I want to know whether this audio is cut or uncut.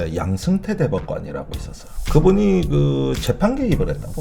uncut